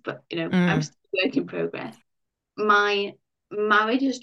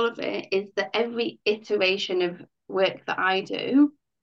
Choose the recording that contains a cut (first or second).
first